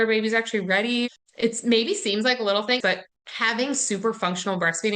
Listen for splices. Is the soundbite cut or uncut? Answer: cut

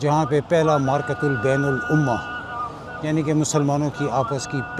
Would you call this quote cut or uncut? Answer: uncut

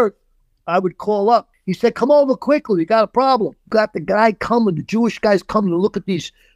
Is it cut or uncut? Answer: cut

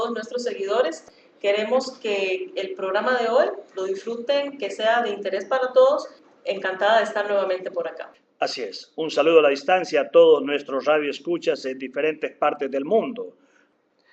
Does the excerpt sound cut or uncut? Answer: uncut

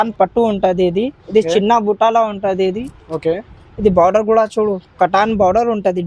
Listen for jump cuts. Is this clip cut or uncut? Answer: uncut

